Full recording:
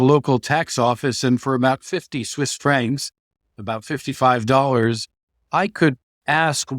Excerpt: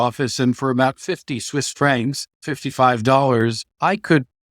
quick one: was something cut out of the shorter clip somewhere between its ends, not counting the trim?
yes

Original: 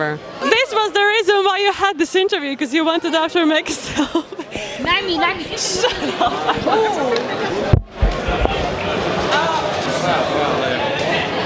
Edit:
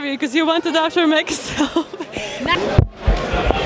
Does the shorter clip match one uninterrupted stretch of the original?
no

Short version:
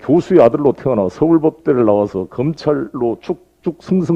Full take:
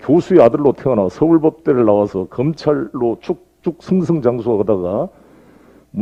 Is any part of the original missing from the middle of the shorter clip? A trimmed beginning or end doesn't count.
no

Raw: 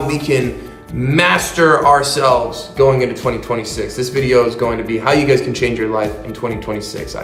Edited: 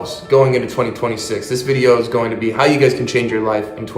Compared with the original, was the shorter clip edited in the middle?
no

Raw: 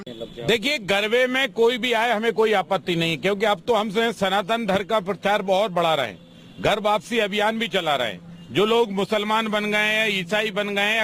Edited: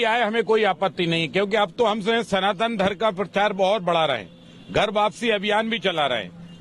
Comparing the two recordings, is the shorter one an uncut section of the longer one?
yes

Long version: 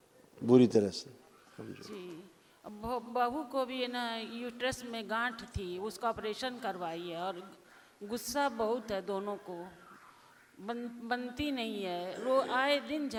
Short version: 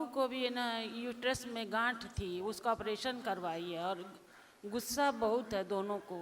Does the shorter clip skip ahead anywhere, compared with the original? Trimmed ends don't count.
no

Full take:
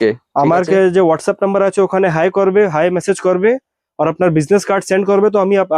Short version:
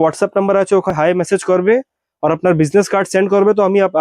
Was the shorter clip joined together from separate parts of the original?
yes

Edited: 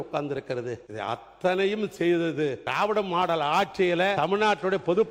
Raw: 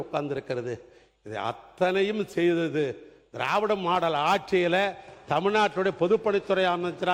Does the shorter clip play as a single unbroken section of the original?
no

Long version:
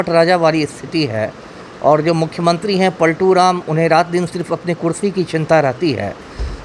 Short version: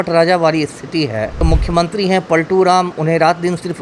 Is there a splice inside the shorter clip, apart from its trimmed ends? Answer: yes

